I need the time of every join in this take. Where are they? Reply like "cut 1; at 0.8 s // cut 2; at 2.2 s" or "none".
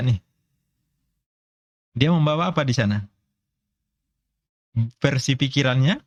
none